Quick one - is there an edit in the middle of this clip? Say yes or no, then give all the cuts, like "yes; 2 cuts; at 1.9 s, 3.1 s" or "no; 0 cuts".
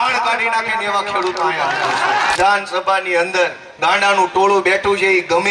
yes; 2 cuts; at 2.3 s, 3.6 s